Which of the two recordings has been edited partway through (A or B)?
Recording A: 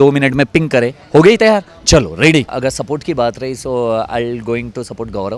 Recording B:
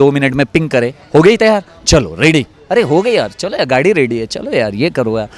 A